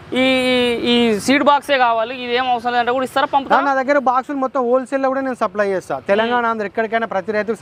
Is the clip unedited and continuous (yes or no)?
yes